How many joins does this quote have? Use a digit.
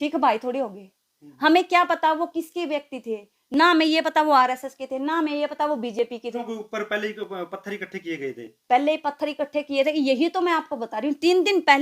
1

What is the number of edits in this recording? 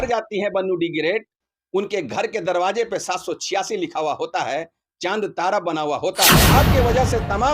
1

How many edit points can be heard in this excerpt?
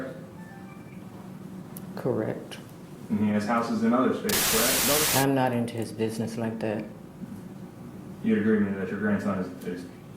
1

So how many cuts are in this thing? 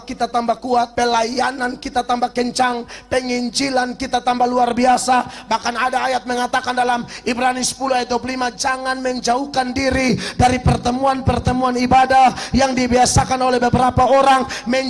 1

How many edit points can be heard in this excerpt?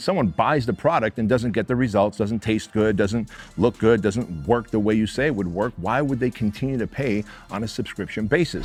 0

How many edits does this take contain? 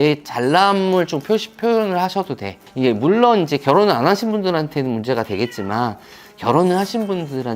1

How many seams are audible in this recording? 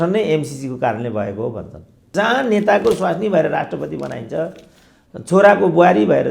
1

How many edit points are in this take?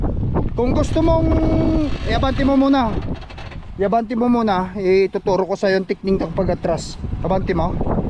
0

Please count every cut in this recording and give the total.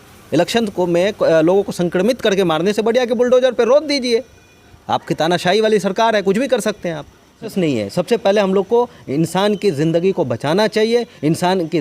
1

